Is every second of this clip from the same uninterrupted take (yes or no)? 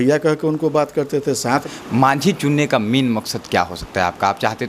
no